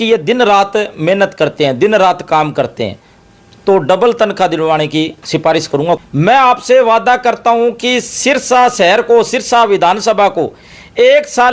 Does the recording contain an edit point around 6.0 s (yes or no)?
yes